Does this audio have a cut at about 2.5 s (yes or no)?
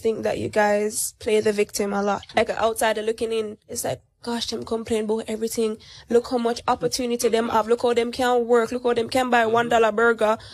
yes